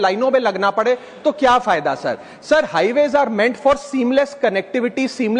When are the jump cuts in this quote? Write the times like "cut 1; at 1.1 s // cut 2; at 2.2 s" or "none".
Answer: none

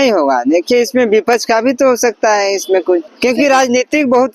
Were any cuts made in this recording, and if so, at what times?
cut 1; at 3.1 s

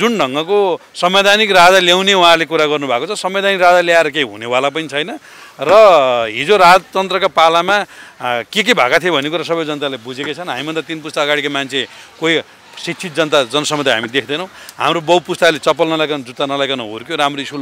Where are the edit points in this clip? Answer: none

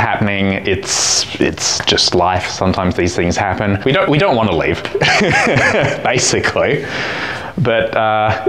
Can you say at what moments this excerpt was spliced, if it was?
cut 1; at 3.8 s

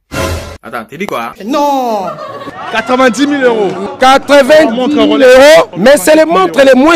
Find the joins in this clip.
cut 1; at 3.8 s // cut 2; at 5.7 s

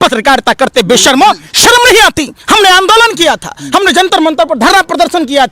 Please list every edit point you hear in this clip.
none

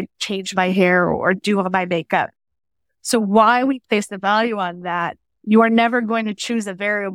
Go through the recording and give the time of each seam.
cut 1; at 5.3 s

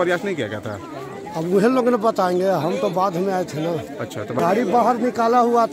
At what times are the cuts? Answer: cut 1; at 4.4 s

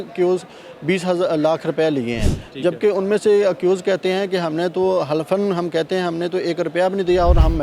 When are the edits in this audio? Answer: none

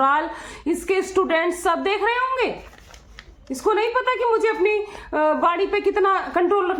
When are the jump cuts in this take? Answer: none

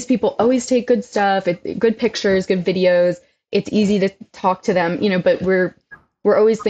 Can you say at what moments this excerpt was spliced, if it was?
none

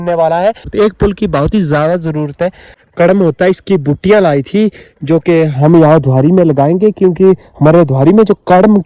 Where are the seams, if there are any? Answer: cut 1; at 0.8 s // cut 2; at 2.7 s

